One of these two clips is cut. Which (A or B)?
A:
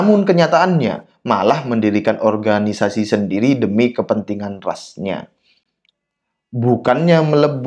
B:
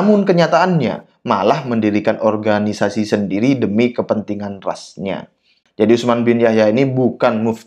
B